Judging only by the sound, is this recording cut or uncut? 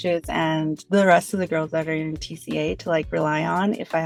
uncut